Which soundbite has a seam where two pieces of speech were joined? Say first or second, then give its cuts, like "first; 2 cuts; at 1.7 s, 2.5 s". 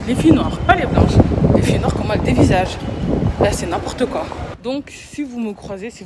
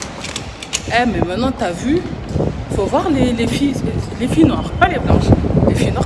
first; 1 cut; at 4.5 s